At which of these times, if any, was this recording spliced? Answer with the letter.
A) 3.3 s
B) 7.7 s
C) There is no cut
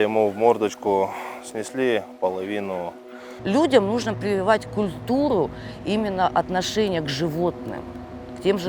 A